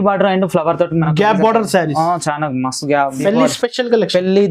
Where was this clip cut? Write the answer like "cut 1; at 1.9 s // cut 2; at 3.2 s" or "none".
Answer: cut 1; at 3.2 s

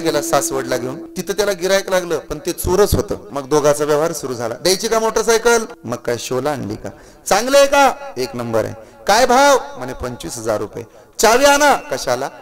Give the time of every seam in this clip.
cut 1; at 1.1 s // cut 2; at 3.3 s // cut 3; at 5.8 s

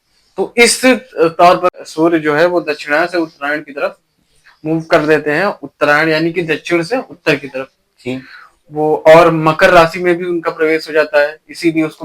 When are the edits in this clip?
cut 1; at 1.8 s

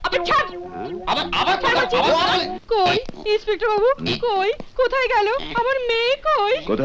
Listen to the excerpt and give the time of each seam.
cut 1; at 2.5 s

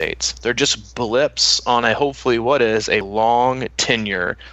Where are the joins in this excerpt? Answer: cut 1; at 3.1 s

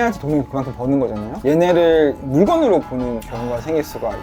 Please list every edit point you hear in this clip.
cut 1; at 1.4 s // cut 2; at 2.2 s // cut 3; at 3.3 s

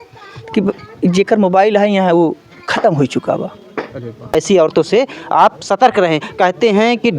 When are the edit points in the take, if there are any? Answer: cut 1; at 4.3 s

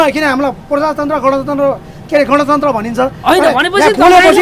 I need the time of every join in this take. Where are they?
none

